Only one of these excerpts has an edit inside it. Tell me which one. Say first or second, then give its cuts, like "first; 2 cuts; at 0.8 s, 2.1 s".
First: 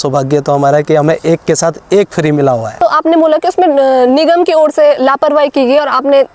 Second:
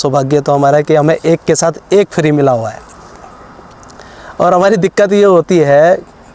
first; 1 cut; at 2.8 s